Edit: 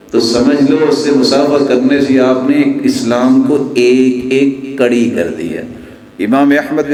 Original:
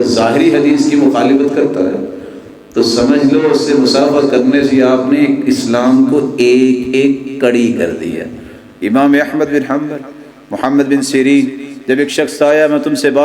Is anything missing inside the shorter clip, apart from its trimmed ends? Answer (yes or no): no